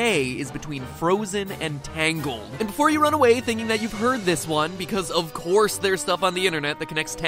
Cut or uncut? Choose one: uncut